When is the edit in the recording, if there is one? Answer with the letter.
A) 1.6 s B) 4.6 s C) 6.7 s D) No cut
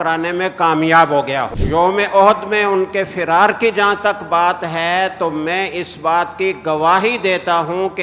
A